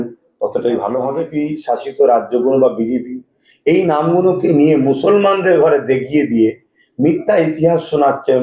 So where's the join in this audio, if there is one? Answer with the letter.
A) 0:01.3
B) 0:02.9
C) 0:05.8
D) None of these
A